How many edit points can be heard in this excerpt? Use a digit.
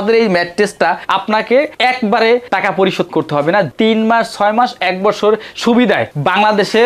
2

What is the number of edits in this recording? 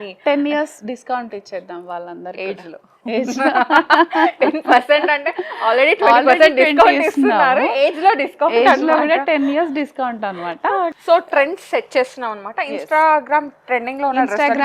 1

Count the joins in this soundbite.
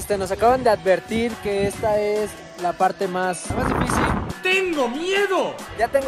0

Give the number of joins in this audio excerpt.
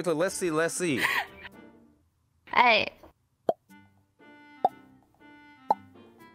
0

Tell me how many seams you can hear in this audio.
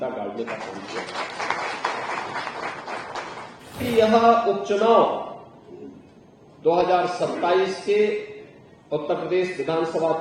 1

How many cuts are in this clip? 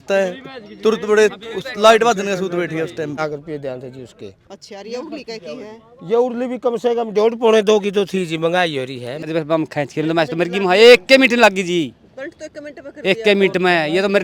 2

